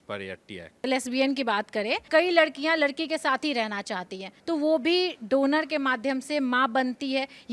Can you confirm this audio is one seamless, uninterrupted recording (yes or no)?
no